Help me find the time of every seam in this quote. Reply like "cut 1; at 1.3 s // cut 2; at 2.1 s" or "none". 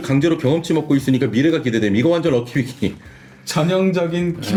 none